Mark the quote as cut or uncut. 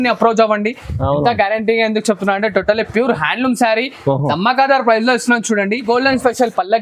cut